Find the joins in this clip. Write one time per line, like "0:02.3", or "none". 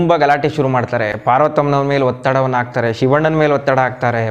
none